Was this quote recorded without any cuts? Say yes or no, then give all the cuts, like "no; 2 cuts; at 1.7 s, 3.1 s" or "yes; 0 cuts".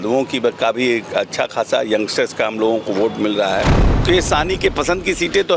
no; 1 cut; at 4.0 s